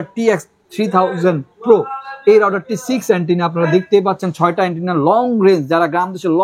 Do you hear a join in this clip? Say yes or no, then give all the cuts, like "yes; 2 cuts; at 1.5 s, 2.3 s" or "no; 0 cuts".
no; 0 cuts